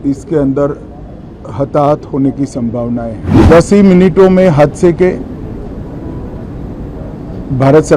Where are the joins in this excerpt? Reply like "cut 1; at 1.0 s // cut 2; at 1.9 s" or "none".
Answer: cut 1; at 3.3 s